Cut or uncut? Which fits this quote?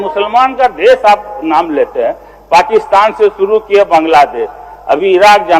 uncut